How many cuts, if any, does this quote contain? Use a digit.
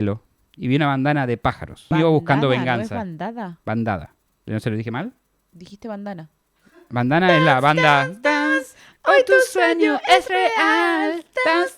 1